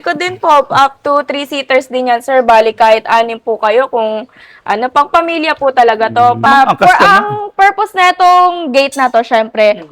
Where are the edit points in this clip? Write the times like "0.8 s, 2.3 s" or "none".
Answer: 6.5 s